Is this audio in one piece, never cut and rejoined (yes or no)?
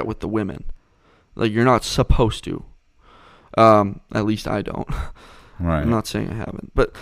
yes